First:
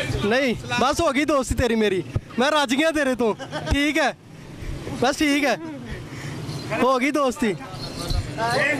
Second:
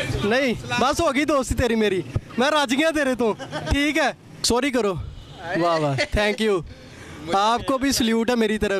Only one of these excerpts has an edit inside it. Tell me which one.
second; 1 cut; at 4.3 s

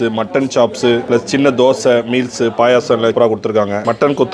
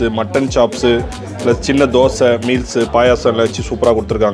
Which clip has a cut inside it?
first; 2 cuts; at 1.0 s, 3.4 s

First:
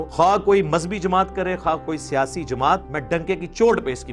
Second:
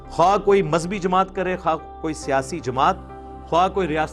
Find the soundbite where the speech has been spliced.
first; 2 cuts; at 1.8 s, 2.9 s

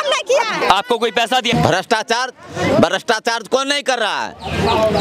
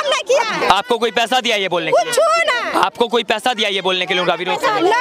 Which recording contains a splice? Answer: first; 1 cut; at 1.5 s

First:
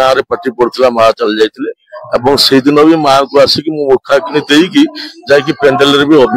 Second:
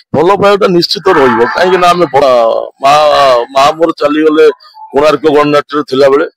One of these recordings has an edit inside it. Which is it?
second; 1 cut; at 2.2 s

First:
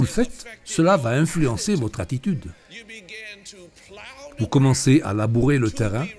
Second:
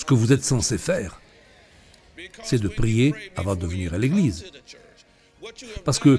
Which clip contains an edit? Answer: first; 2 cuts; at 2.6 s, 4.4 s

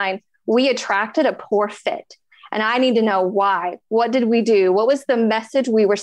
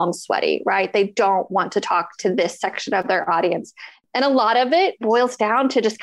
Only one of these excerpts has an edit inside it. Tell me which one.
second; 1 cut; at 5.0 s

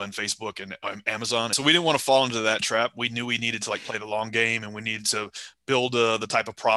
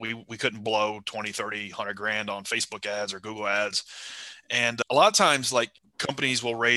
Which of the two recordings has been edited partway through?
first; 1 cut; at 1.5 s

